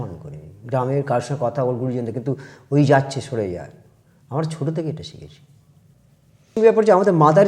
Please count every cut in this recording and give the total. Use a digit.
1